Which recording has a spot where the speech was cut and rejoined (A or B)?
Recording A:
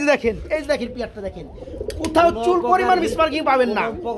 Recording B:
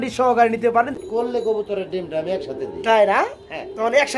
B